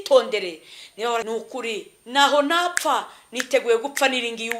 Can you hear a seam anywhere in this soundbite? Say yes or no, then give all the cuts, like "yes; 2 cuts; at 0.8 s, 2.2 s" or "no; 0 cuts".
yes; 1 cut; at 1.3 s